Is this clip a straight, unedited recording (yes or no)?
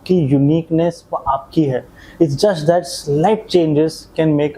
yes